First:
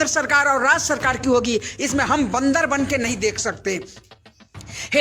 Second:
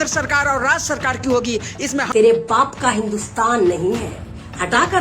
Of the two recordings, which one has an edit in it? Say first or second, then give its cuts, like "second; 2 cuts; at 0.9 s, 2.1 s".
second; 1 cut; at 2.1 s